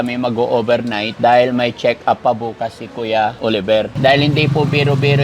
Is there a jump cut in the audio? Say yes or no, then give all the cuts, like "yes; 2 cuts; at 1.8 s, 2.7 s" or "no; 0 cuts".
yes; 2 cuts; at 1.1 s, 3.6 s